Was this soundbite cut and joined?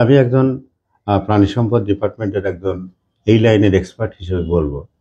no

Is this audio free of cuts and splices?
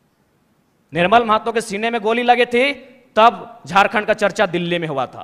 yes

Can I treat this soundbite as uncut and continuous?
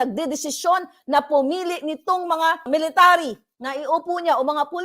no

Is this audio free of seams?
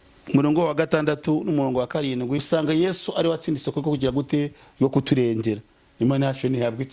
no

